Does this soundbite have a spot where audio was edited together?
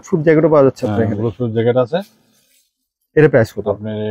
no; 0 cuts

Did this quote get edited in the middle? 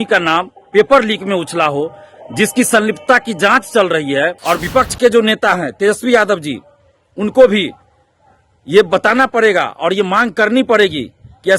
yes; 1 cut; at 4.4 s

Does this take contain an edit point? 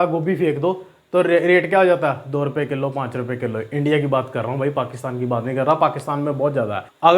no; 0 cuts

